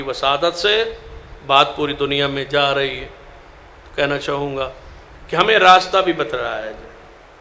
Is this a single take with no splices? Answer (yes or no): yes